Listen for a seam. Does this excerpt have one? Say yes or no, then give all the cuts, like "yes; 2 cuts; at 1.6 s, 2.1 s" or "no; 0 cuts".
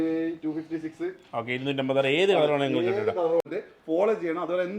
yes; 1 cut; at 3.5 s